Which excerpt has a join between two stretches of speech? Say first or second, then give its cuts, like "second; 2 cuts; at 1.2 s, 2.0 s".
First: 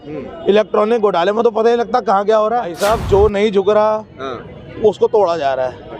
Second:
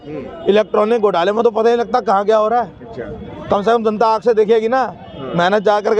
first; 1 cut; at 2.7 s